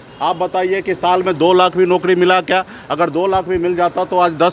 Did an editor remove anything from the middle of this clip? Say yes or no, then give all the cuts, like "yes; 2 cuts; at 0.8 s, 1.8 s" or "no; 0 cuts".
no; 0 cuts